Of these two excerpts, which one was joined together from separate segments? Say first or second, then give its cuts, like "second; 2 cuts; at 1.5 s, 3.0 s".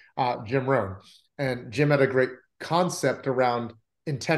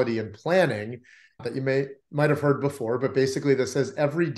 second; 1 cut; at 1.4 s